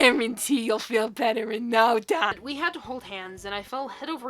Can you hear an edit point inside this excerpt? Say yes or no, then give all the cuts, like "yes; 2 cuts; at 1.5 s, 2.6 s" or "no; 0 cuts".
yes; 1 cut; at 2.4 s